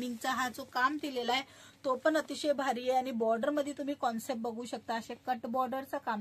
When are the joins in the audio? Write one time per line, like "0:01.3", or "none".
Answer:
none